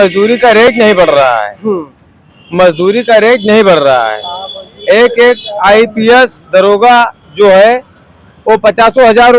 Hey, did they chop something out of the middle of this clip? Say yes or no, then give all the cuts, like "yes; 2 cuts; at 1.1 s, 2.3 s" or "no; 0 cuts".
no; 0 cuts